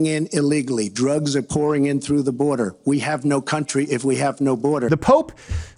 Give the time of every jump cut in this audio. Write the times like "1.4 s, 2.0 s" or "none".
4.9 s